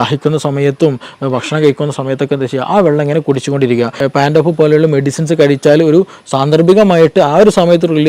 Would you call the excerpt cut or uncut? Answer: cut